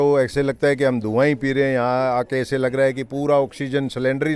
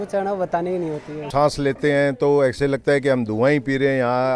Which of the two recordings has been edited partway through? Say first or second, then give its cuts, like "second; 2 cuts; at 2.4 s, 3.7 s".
second; 1 cut; at 1.3 s